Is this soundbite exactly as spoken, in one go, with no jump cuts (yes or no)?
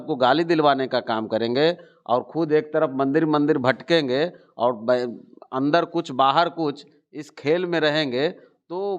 yes